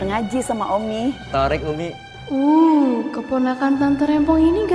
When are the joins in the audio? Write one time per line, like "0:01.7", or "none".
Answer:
0:01.2
0:02.1